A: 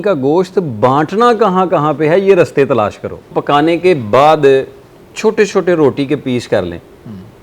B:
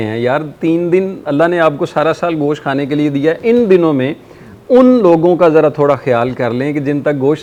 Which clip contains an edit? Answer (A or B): A